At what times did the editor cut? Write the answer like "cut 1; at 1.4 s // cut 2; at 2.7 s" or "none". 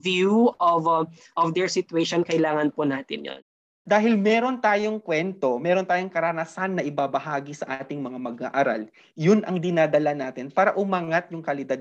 cut 1; at 3.6 s